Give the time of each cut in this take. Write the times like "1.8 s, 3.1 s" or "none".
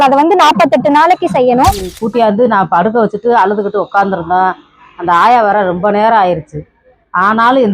1.9 s